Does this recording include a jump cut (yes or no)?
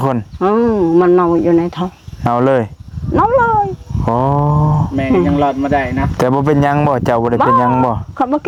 no